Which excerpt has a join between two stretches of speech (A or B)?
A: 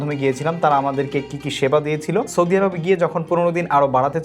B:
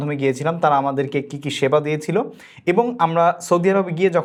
A